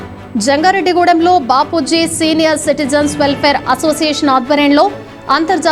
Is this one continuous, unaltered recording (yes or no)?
yes